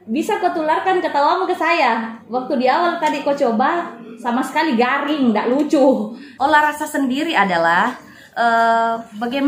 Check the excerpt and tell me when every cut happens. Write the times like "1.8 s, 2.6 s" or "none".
6.2 s